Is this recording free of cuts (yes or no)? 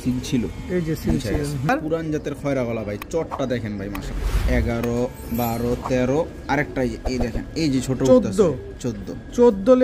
no